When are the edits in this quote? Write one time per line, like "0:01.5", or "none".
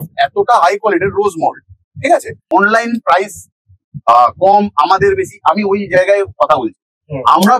0:02.4